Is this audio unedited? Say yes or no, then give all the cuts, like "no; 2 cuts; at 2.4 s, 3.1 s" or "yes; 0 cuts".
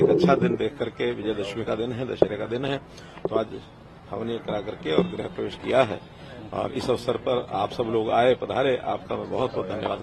yes; 0 cuts